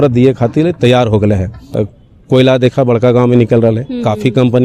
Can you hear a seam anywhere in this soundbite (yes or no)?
yes